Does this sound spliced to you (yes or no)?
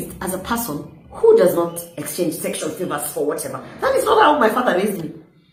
no